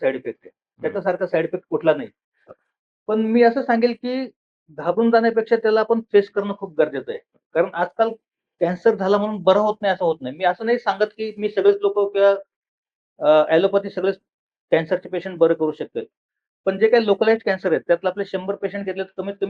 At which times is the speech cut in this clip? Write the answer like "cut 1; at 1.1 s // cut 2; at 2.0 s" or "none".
cut 1; at 2.6 s